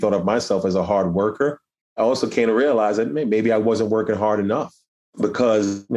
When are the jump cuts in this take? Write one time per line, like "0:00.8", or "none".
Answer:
0:02.0
0:04.8